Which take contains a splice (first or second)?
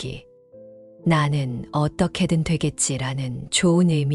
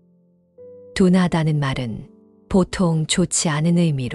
second